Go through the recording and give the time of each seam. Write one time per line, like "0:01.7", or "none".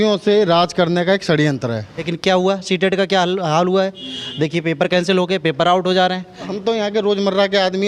0:02.1
0:06.5